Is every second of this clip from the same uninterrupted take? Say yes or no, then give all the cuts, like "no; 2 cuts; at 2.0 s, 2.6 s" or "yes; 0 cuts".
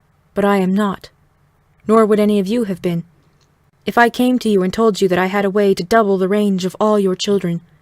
no; 1 cut; at 5.8 s